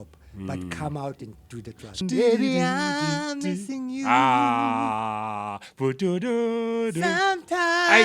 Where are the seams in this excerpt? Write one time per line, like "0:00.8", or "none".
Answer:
0:02.0